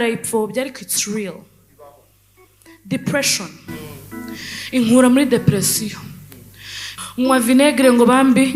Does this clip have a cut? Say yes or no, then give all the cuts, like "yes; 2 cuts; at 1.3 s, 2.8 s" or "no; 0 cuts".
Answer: yes; 1 cut; at 6.9 s